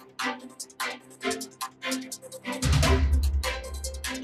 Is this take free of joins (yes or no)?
yes